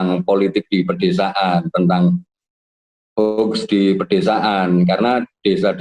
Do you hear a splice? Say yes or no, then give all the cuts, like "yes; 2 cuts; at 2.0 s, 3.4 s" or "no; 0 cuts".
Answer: no; 0 cuts